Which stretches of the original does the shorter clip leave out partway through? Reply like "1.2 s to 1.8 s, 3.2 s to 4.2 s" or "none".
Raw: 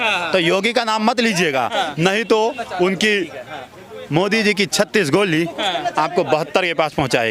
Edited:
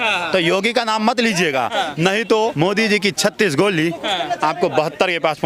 2.5 s to 4.1 s